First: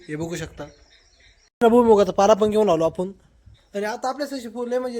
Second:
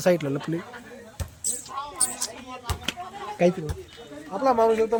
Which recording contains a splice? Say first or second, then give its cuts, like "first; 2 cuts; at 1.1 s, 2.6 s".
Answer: first; 1 cut; at 1.6 s